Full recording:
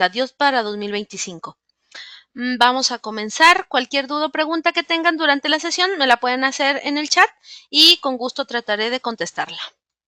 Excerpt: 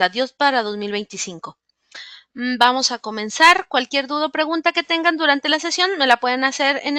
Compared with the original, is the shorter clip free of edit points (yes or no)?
yes